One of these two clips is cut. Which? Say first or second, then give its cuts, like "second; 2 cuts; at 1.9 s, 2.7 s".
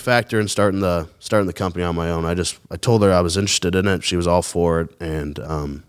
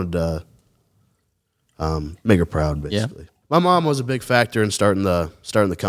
second; 1 cut; at 3.3 s